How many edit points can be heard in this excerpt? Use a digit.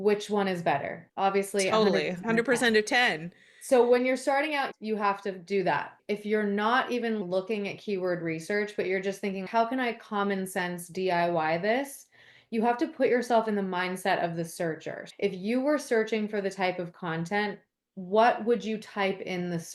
1